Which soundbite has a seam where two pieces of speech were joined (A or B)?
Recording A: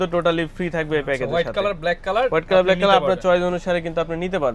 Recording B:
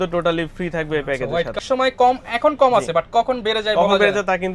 B